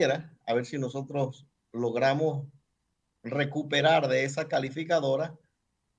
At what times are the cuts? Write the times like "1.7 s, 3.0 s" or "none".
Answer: none